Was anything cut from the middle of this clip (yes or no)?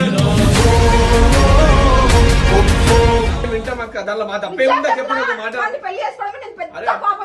no